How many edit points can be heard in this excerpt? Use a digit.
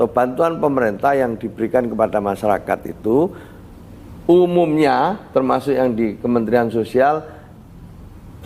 0